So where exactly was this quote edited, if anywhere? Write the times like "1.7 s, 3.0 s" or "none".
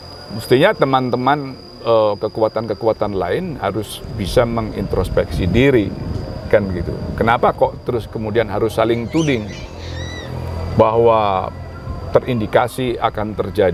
none

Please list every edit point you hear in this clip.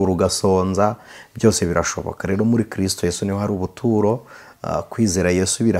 none

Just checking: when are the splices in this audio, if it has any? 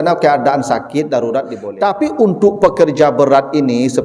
2.0 s

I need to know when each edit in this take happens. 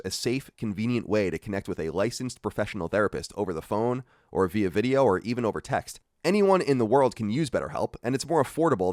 none

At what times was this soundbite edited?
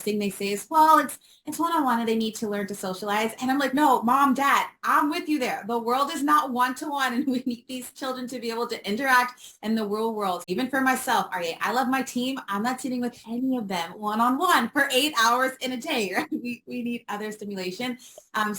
10.4 s

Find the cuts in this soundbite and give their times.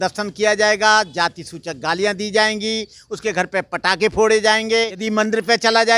5.0 s

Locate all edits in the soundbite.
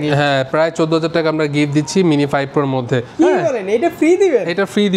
2.6 s

